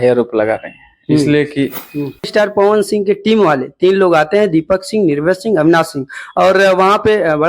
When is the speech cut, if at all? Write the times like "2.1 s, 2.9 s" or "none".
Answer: 2.3 s